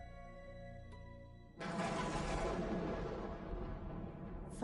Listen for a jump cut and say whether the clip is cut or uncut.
cut